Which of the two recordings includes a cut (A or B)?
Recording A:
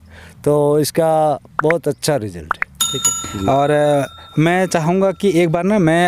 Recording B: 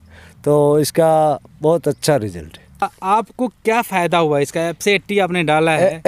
B